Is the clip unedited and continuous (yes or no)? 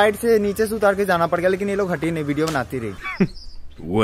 no